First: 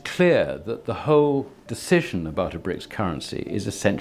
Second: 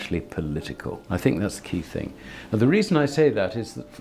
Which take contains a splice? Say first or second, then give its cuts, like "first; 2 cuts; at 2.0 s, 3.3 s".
second; 1 cut; at 1.0 s